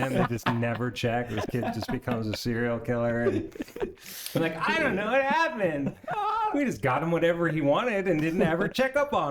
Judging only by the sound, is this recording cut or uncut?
uncut